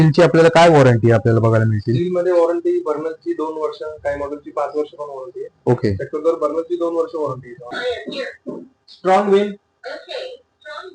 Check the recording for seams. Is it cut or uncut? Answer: cut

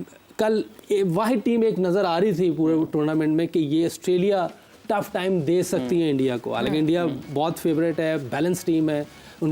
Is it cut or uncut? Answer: uncut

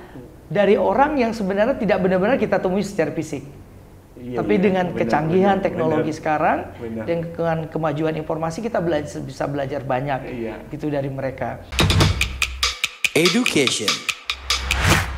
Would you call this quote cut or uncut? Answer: cut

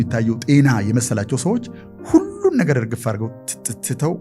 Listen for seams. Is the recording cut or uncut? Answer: uncut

